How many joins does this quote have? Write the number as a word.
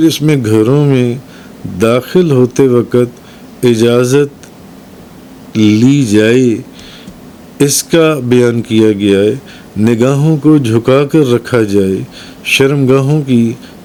zero